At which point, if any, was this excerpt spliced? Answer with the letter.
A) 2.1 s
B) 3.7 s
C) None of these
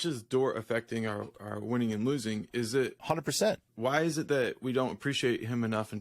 B